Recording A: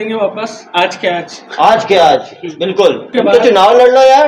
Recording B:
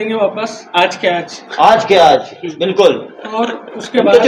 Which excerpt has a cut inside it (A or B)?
A